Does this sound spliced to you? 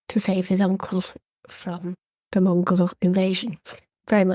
no; 0 cuts

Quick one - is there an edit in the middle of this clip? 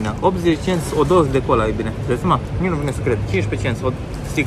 no; 0 cuts

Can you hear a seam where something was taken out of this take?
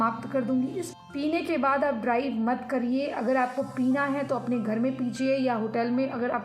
yes; 1 cut; at 0.9 s

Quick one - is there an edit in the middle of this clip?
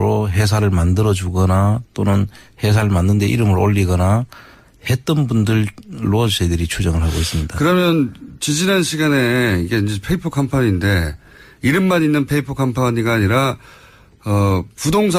no; 0 cuts

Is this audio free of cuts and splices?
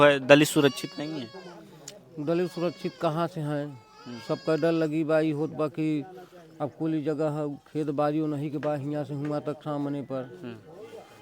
yes; 0 cuts

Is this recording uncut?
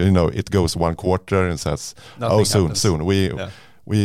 yes; 0 cuts

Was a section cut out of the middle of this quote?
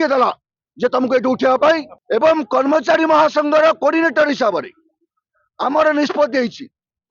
yes; 1 cut; at 1.9 s

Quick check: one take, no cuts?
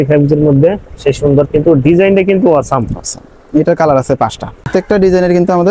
no; 1 cut; at 4.6 s

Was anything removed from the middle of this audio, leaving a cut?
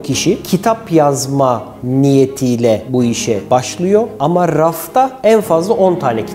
no; 0 cuts

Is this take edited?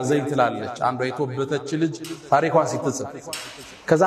no; 0 cuts

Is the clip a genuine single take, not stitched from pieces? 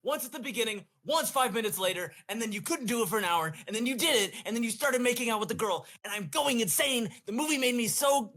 yes; 0 cuts

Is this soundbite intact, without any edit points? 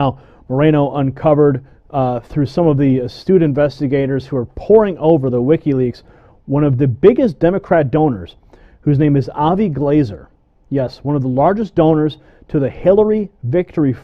no; 1 cut; at 10.2 s

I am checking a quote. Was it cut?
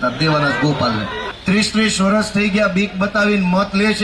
yes; 1 cut; at 1.2 s

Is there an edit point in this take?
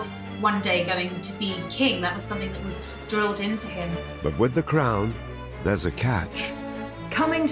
yes; 1 cut; at 4.0 s

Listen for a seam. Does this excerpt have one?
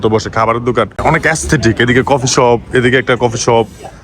yes; 1 cut; at 1.0 s

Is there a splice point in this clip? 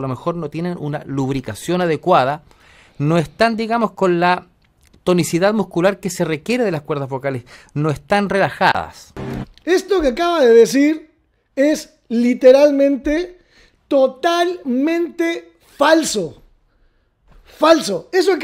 no; 0 cuts

